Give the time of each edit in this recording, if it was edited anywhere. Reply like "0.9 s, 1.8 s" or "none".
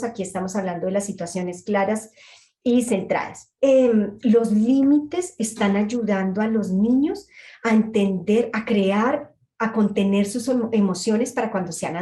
3.4 s